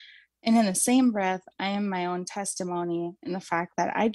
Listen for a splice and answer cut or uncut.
uncut